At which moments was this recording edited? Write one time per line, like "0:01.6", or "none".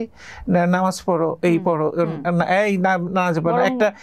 none